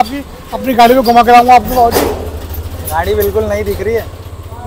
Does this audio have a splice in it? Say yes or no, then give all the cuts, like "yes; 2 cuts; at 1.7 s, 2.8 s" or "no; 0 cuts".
no; 0 cuts